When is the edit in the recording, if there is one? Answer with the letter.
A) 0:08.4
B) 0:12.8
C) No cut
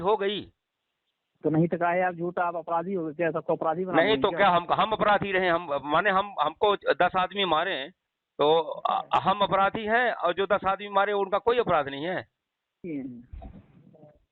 B